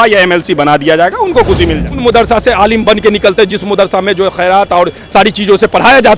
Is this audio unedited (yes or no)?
no